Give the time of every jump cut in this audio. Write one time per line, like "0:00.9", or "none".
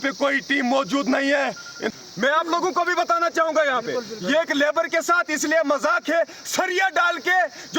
0:02.0

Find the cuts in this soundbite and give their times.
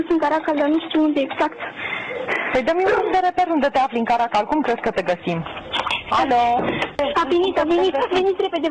0:05.9
0:07.0

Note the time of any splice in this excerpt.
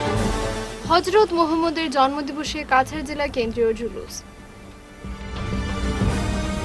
none

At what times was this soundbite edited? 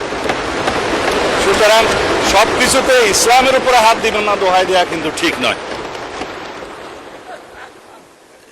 none

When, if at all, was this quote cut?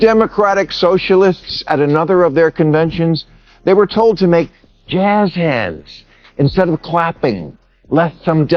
none

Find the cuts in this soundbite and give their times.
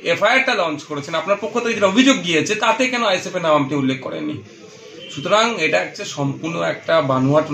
none

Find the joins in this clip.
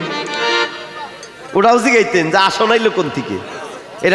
none

